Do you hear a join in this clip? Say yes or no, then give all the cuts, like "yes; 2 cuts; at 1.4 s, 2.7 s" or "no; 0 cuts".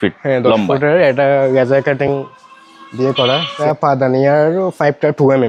yes; 1 cut; at 3.6 s